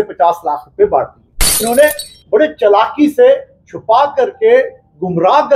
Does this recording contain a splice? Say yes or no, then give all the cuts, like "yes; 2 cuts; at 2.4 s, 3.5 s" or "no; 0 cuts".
yes; 1 cut; at 1.6 s